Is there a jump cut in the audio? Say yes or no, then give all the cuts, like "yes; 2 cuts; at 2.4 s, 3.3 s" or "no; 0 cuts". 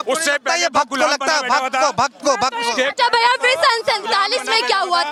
no; 0 cuts